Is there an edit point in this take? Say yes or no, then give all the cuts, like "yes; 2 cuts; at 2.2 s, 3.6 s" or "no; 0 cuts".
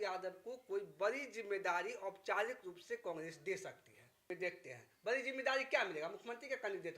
yes; 1 cut; at 4.2 s